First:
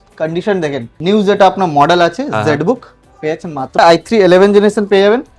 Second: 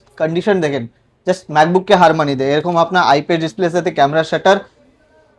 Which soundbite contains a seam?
first; 2 cuts; at 0.9 s, 3.8 s

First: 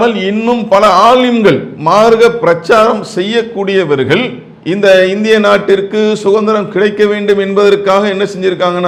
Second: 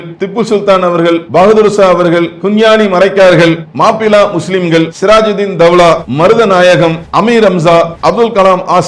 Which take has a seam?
second; 7 cuts; at 1.2 s, 2.4 s, 3.7 s, 4.9 s, 6.1 s, 7.0 s, 7.9 s

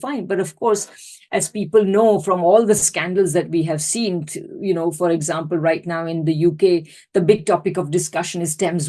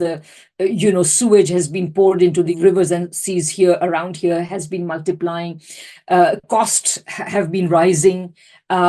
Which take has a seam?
second; 1 cut; at 2.5 s

